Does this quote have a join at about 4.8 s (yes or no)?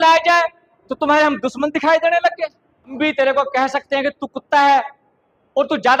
no